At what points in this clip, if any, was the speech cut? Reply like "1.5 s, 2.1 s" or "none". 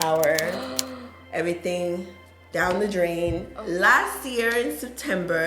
3.5 s